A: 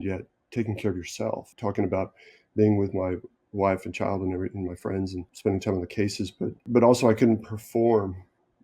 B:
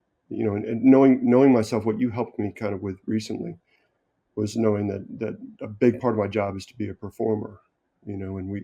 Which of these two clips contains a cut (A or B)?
A